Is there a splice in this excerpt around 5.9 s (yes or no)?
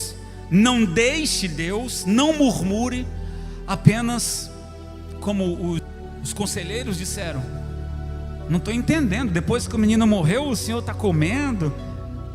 yes